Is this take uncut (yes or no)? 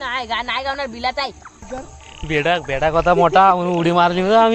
no